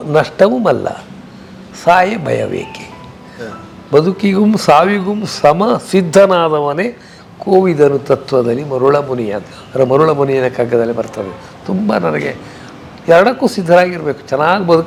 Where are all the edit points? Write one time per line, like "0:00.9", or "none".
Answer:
none